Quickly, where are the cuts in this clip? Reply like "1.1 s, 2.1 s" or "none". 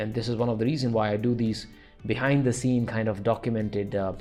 none